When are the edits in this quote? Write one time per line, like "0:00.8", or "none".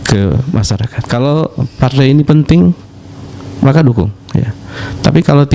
0:00.9

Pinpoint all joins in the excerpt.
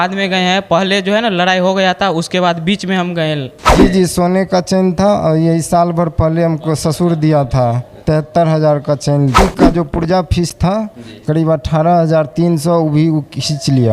0:03.7
0:09.4

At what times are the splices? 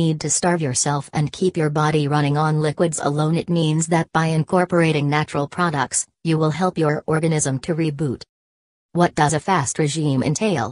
none

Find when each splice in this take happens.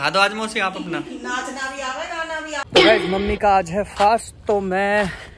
0:02.6

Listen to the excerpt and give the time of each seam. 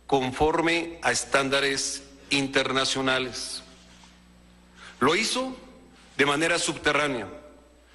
0:05.3

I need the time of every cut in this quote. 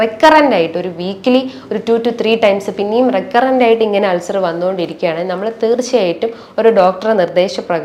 none

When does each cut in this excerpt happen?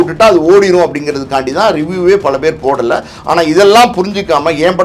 none

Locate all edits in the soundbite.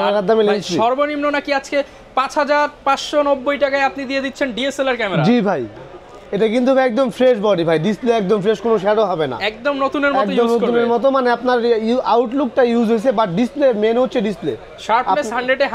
none

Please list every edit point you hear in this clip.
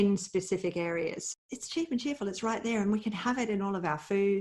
0:01.3

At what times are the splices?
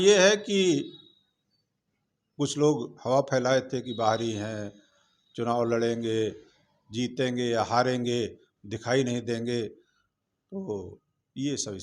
none

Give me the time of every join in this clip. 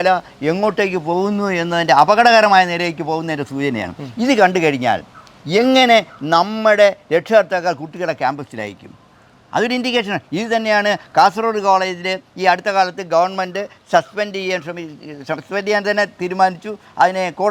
none

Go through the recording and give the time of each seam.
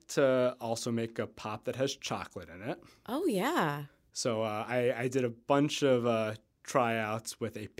none

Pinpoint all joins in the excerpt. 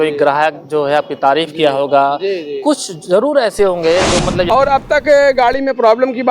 0:04.5

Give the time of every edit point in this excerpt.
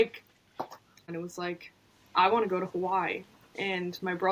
0:01.2

